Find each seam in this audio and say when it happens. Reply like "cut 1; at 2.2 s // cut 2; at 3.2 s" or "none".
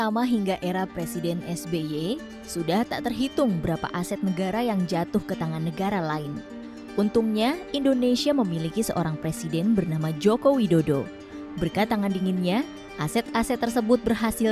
none